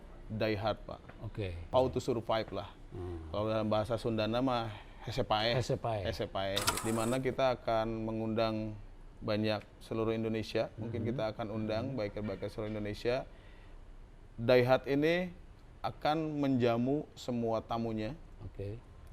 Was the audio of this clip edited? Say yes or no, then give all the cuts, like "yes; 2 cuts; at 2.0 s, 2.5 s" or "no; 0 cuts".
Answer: yes; 2 cuts; at 1.6 s, 6.7 s